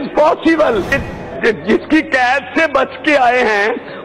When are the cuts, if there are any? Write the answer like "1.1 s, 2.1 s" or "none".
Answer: 1.0 s

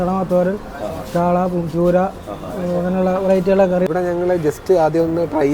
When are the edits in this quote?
3.9 s

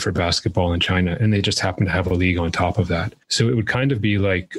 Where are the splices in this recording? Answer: 3.2 s

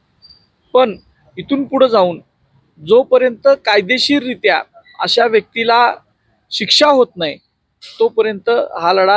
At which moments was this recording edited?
none

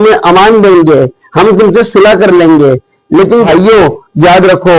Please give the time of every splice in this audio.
3.5 s

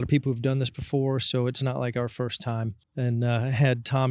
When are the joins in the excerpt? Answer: 2.8 s

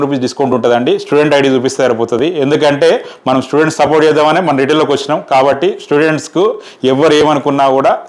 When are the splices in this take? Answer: none

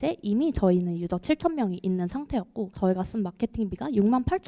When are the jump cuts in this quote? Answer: 2.7 s

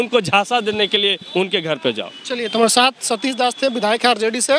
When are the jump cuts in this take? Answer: none

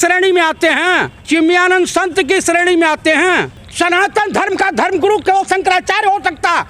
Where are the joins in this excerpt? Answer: 1.1 s, 3.6 s

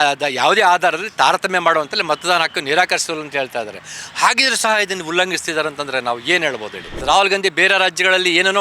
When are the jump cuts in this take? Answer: 7.0 s

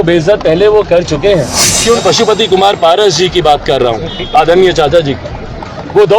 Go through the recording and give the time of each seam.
1.9 s

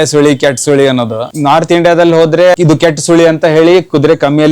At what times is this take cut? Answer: 1.2 s, 2.5 s

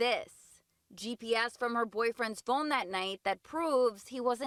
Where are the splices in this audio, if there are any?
none

